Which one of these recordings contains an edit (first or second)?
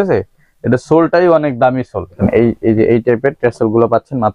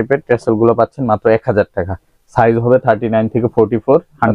first